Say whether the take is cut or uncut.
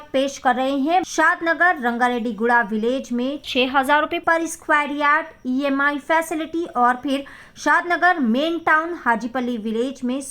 cut